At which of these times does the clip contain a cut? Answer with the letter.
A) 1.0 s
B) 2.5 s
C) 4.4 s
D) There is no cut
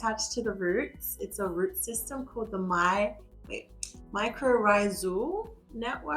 D